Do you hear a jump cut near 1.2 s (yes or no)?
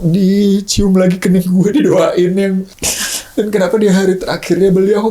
no